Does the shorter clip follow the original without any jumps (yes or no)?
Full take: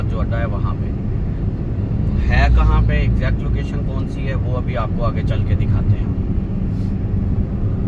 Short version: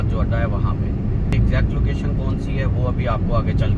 no